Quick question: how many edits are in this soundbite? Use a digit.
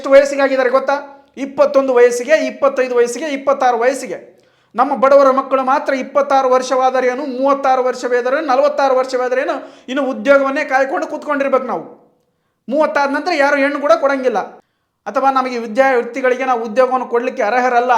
1